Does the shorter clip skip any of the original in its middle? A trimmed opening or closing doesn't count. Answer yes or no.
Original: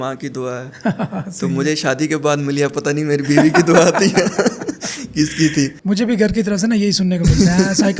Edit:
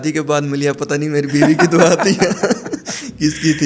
no